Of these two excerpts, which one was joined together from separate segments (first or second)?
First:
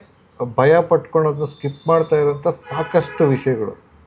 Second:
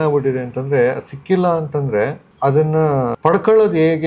second